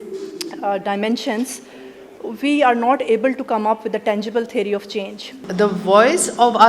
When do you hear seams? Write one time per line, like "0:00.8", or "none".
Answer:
0:05.4